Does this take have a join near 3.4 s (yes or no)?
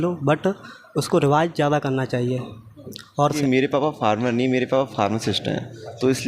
yes